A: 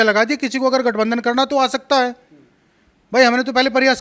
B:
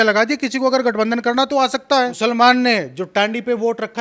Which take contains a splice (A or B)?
B